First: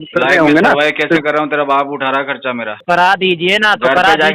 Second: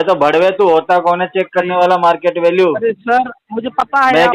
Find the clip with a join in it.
first; 1 cut; at 2.7 s

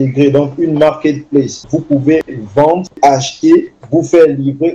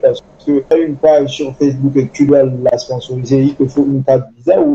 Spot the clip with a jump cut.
first; 3 cuts; at 1.7 s, 2.9 s, 3.8 s

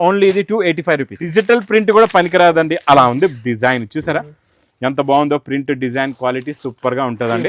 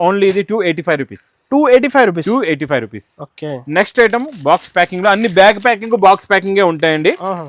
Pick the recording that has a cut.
first; 1 cut; at 1.2 s

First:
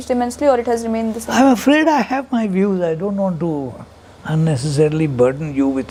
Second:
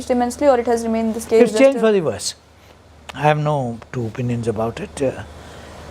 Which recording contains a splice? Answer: second; 1 cut; at 1.2 s

